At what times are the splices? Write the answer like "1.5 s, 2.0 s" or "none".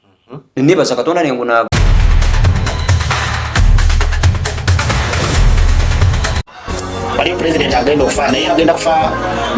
1.7 s